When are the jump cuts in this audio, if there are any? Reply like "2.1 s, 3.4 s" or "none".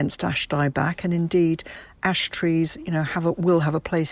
none